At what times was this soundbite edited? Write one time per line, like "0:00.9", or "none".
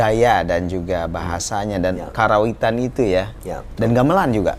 none